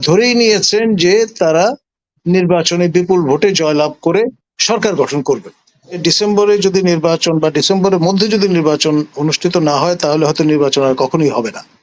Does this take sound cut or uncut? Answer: cut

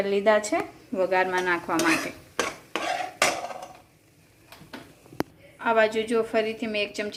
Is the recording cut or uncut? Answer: uncut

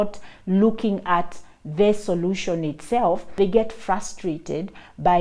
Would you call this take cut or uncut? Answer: cut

